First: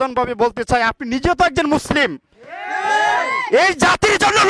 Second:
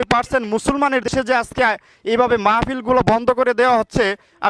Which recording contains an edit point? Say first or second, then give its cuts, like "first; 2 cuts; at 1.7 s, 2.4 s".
second; 1 cut; at 1.1 s